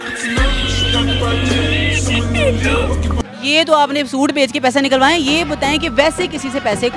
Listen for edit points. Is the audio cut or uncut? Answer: cut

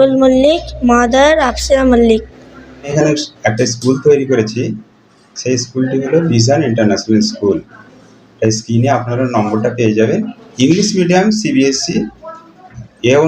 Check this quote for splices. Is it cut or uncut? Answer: cut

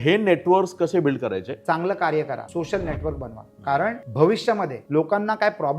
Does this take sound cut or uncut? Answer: cut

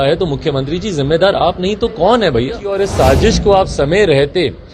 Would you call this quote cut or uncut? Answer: cut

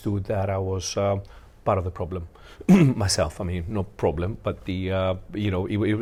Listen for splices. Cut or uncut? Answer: uncut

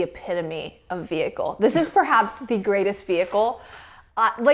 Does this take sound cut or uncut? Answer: uncut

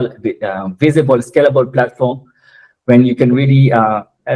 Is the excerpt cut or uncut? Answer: uncut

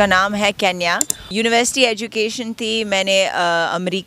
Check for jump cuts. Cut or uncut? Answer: cut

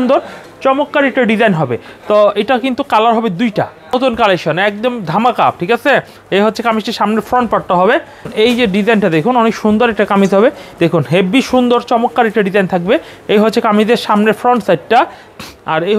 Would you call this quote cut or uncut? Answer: cut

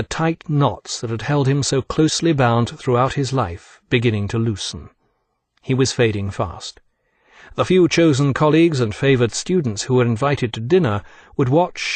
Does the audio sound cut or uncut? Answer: uncut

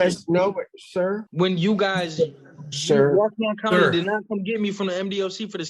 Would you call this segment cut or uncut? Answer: cut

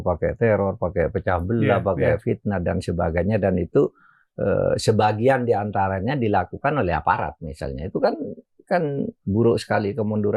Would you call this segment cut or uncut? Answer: uncut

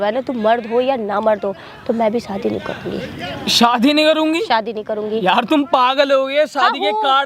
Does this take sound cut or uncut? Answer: uncut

